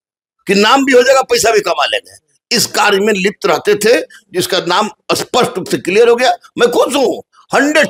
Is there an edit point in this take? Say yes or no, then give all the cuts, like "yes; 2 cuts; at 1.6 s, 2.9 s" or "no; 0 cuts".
no; 0 cuts